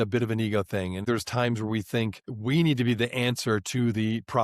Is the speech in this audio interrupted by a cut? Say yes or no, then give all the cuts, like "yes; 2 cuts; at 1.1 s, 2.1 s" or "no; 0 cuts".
yes; 1 cut; at 1.0 s